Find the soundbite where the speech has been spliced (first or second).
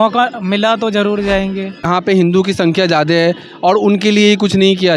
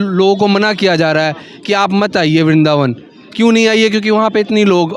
first